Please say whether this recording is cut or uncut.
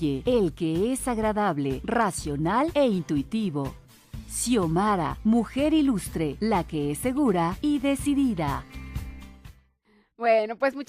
uncut